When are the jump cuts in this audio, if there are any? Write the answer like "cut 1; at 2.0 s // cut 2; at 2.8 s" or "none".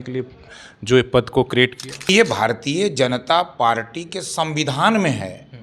cut 1; at 2.1 s